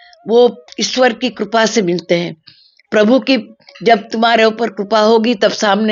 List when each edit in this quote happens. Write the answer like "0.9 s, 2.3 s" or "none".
none